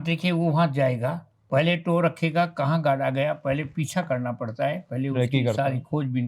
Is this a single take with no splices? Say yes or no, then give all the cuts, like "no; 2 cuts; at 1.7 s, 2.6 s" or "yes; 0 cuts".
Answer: yes; 0 cuts